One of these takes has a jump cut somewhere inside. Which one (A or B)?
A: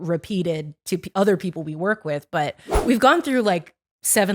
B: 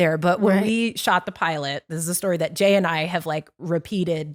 A